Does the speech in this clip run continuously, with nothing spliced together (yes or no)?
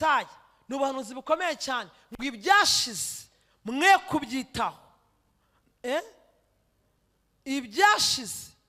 yes